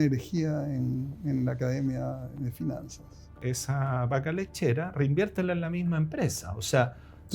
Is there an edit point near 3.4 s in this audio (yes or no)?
yes